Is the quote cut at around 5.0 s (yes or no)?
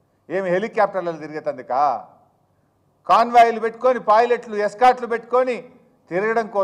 yes